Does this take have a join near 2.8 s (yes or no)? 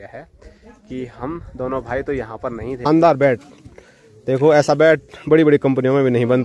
yes